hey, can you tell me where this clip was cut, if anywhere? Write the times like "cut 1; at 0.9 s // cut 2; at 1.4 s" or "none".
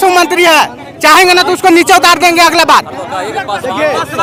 none